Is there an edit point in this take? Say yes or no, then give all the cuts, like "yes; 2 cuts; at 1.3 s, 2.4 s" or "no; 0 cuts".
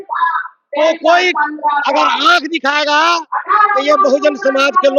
no; 0 cuts